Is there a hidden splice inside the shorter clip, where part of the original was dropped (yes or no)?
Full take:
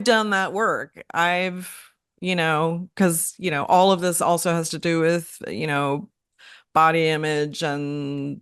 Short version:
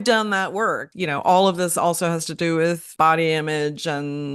yes